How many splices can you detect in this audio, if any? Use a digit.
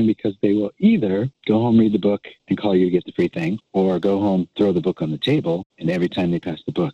4